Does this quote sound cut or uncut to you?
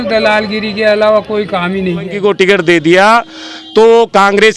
cut